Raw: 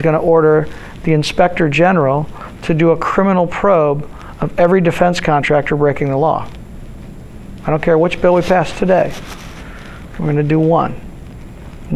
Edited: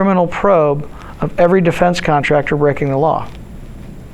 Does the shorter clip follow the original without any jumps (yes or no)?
yes